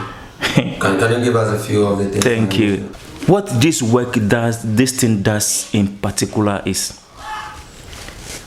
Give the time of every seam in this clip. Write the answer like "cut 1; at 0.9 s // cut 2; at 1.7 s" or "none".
cut 1; at 2.9 s